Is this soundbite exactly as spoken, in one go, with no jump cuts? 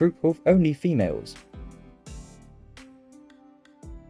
yes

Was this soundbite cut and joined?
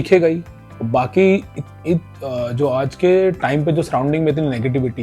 no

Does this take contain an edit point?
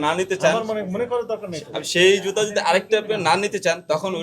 no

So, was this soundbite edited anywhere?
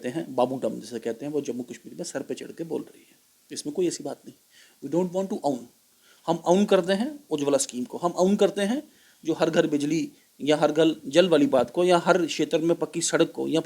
no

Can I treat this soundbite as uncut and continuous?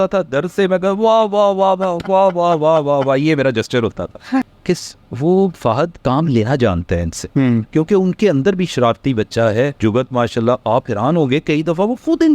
no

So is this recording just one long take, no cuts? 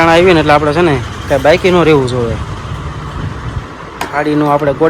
yes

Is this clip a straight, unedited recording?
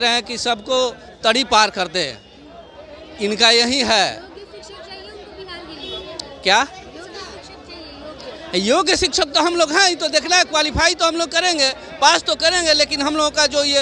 yes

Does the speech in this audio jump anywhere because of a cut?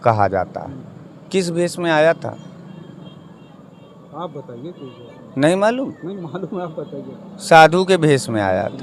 no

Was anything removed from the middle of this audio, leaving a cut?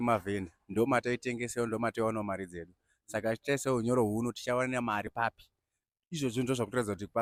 no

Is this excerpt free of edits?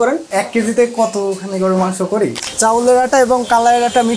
no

